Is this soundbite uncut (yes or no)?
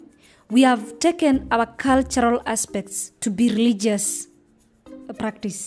yes